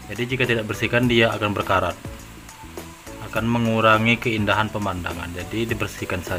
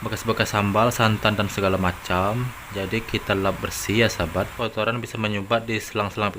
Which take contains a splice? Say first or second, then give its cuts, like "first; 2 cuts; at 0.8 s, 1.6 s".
second; 1 cut; at 4.5 s